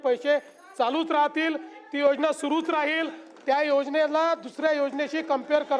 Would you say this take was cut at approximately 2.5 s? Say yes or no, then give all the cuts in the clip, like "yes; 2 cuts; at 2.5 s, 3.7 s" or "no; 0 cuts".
no; 0 cuts